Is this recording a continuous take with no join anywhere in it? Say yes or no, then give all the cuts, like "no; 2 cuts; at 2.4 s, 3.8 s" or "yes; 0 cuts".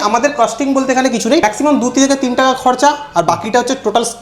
no; 1 cut; at 1.4 s